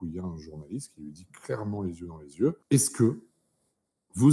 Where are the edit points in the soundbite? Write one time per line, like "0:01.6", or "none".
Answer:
0:02.6